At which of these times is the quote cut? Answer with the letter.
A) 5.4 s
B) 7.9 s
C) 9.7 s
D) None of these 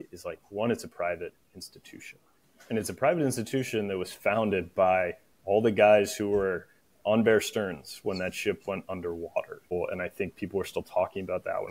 C